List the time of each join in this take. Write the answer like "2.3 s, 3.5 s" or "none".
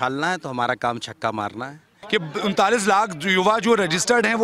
1.9 s